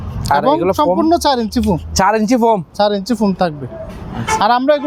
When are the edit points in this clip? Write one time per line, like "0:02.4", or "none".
none

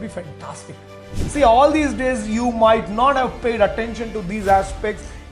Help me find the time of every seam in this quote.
0:01.1

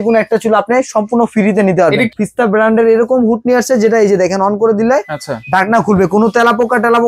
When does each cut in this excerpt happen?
0:02.1

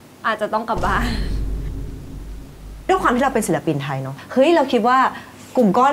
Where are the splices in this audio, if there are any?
0:02.9
0:04.1

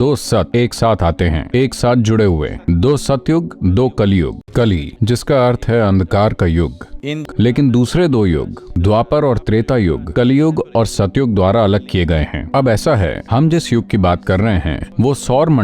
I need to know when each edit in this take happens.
0:04.4
0:07.2

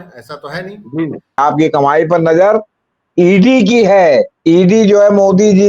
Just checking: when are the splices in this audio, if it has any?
0:01.4

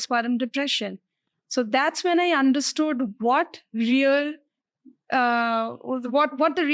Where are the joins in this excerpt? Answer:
none

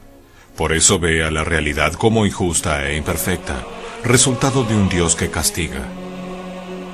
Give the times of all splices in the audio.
0:04.6

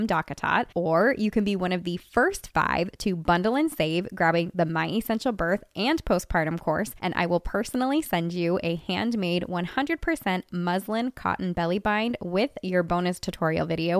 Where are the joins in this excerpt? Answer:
none

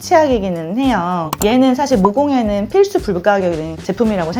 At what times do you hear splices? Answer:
0:01.3

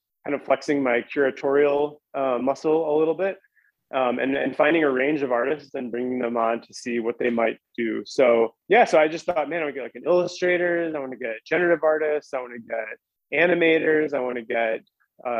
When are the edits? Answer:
0:08.6

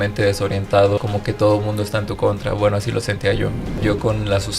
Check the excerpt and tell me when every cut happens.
0:01.0
0:03.8

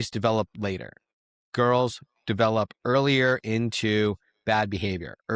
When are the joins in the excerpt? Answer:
none

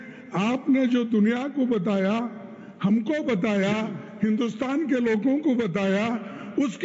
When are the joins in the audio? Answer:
none

